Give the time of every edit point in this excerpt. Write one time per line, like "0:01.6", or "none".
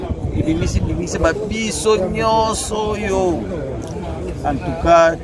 none